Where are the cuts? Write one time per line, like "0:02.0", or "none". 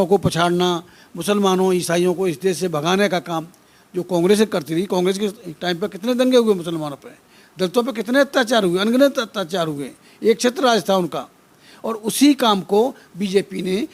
none